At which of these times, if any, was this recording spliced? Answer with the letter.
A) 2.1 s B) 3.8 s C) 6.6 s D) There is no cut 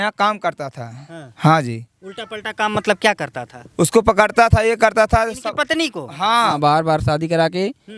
C